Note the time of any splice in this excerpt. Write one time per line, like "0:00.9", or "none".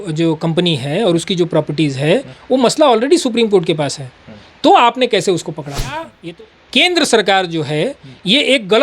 0:06.1

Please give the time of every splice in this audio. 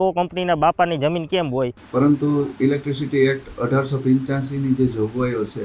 0:01.8

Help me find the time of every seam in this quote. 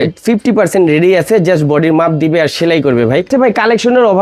0:03.3

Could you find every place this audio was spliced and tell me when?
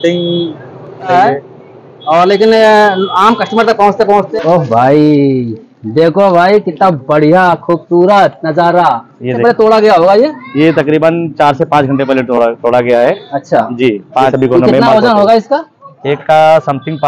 0:01.1
0:04.3
0:09.4
0:14.3

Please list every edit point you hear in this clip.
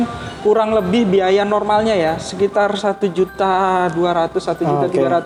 none

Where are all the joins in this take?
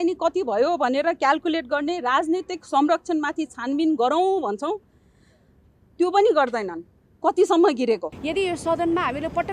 0:08.1

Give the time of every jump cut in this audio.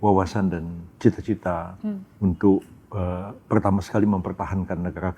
none

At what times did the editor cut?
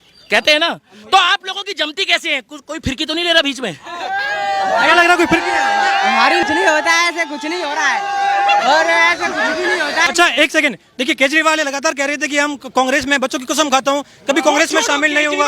0:06.4
0:10.1

